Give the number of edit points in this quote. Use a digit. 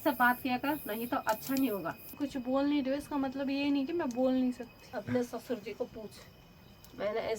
2